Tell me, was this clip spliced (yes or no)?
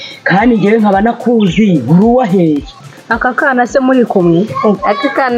yes